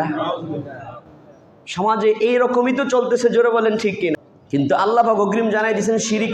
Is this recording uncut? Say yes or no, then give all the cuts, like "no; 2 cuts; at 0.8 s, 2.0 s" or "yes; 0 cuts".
no; 1 cut; at 4.2 s